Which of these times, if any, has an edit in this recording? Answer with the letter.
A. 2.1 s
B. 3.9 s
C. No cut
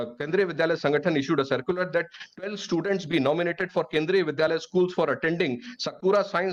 C